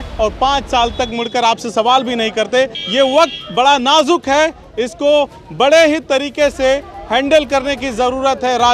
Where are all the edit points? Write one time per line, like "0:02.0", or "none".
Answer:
0:02.8